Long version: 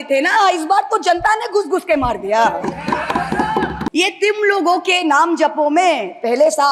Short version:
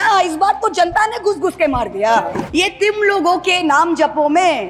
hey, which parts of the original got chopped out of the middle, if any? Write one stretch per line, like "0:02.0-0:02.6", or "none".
0:02.8-0:03.9